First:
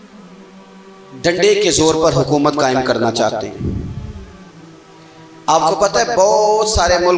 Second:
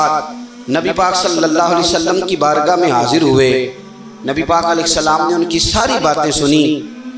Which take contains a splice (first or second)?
first